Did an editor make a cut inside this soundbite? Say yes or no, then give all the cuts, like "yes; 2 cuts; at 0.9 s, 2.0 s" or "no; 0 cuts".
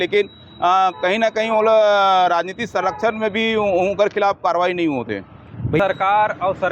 yes; 1 cut; at 5.7 s